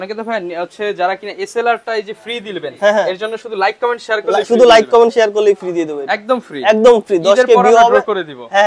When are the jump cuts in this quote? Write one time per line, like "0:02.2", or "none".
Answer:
none